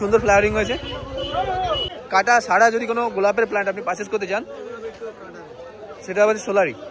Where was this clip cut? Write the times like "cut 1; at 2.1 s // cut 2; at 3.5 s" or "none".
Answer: cut 1; at 1.9 s

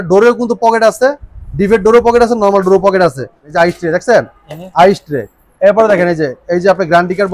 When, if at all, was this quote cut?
cut 1; at 3.4 s

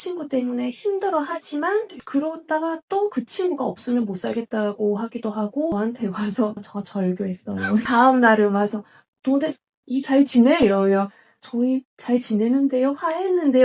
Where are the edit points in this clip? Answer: cut 1; at 5.7 s // cut 2; at 7.8 s

